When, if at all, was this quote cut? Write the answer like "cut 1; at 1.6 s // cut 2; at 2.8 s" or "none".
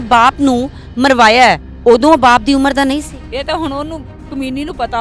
cut 1; at 1.7 s // cut 2; at 3.2 s